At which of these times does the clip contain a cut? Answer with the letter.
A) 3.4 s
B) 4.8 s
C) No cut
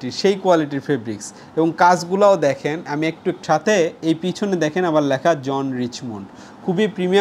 A